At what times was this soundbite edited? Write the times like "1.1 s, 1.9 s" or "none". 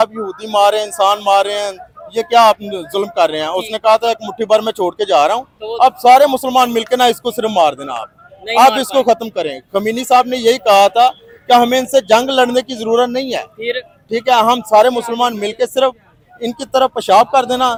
none